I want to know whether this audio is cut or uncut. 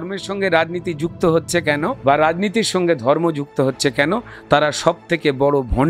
cut